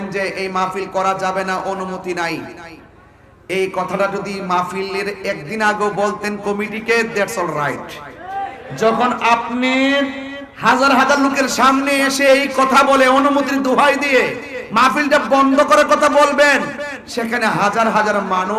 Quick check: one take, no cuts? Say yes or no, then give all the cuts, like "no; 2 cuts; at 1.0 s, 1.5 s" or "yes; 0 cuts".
yes; 0 cuts